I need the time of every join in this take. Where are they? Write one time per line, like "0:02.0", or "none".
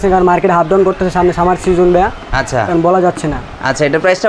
none

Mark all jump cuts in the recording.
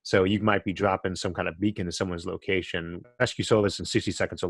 0:03.1

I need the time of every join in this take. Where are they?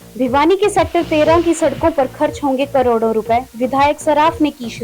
none

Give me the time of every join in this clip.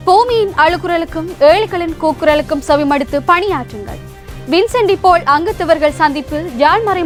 none

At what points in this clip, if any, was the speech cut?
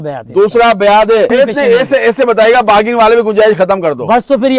0:01.3

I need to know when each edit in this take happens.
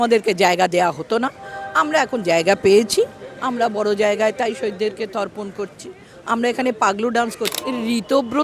0:07.5

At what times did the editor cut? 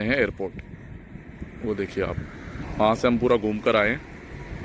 0:02.6

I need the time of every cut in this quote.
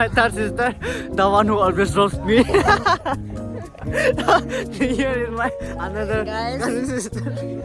none

